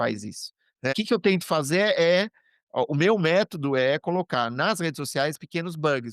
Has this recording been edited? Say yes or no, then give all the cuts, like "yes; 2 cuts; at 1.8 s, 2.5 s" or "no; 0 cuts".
yes; 1 cut; at 0.9 s